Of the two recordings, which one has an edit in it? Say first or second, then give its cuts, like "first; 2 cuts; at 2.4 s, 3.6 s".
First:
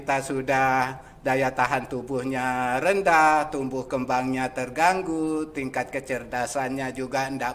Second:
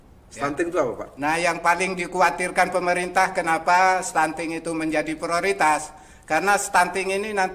second; 1 cut; at 1.1 s